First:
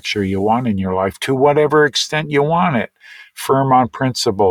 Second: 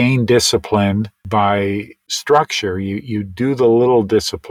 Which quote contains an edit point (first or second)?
second